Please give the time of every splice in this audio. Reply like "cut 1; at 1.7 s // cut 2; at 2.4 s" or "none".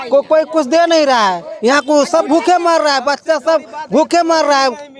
none